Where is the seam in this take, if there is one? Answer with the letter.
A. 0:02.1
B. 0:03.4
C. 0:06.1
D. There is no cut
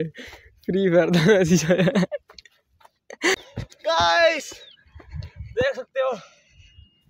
B